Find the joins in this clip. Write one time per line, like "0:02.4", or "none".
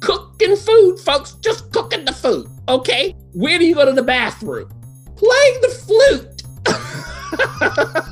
0:03.2